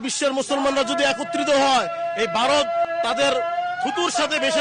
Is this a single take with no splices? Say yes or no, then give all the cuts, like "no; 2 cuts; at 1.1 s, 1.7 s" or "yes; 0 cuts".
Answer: no; 1 cut; at 2.9 s